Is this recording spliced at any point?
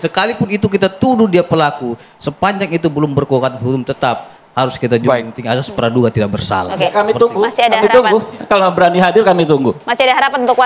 no; 0 cuts

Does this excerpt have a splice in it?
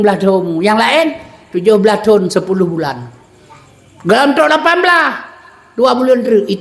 no; 0 cuts

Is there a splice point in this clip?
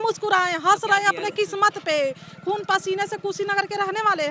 no; 0 cuts

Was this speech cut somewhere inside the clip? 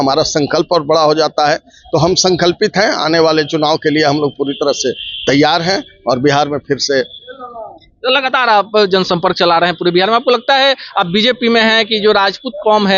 no; 0 cuts

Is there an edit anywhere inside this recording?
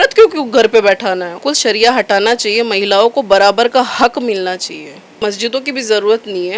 yes; 2 cuts; at 1.3 s, 5.2 s

